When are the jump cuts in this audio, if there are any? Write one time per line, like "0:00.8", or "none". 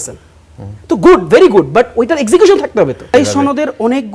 0:03.1